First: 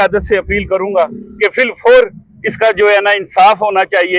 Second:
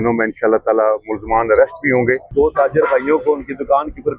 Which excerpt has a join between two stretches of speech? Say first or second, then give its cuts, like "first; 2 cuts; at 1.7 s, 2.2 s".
second; 1 cut; at 2.3 s